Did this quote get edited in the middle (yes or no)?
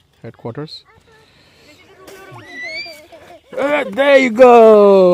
yes